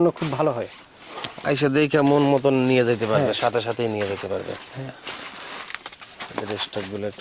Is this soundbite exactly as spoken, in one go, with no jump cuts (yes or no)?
yes